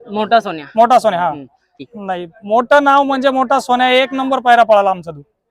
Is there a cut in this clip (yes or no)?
yes